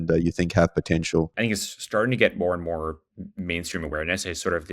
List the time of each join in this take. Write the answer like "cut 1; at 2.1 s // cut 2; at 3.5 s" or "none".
cut 1; at 1.3 s